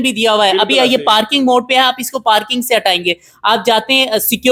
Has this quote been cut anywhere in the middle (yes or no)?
no